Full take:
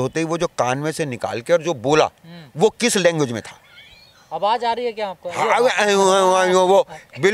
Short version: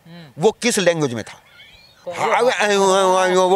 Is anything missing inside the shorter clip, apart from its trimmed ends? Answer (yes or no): yes